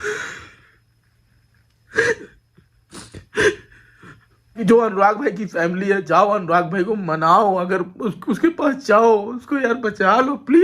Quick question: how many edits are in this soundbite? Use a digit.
1